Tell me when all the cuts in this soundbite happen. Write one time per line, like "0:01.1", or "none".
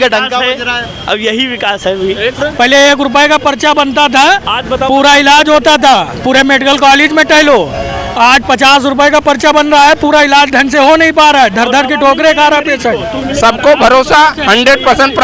0:02.4
0:13.2